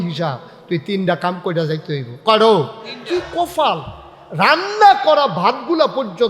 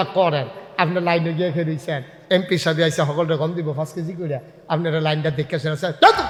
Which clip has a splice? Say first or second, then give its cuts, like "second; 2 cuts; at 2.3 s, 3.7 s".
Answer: first; 1 cut; at 3.0 s